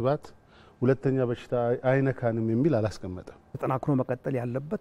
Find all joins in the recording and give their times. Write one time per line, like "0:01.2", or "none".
0:03.5